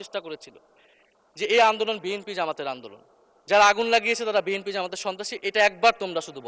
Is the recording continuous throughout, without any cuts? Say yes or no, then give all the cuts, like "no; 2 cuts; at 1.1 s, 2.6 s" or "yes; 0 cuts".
yes; 0 cuts